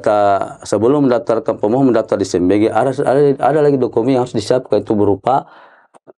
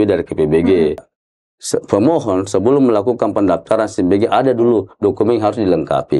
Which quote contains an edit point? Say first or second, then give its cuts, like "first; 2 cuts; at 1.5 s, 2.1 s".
second; 1 cut; at 1.1 s